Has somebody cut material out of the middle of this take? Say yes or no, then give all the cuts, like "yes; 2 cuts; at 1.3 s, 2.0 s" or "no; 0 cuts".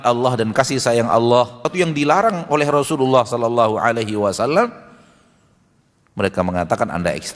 yes; 1 cut; at 1.7 s